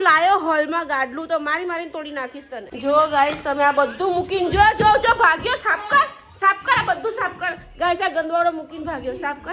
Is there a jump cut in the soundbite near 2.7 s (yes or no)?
yes